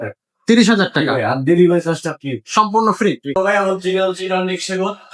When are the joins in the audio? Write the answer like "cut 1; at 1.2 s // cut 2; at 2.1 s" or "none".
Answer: cut 1; at 3.4 s